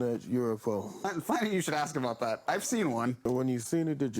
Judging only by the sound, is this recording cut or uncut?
cut